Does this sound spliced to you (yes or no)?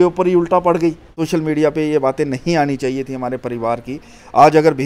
yes